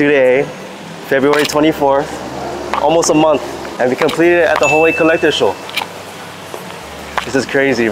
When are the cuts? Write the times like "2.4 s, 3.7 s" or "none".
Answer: 3.6 s